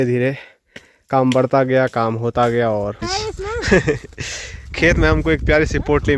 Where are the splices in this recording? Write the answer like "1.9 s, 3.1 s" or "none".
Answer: 3.1 s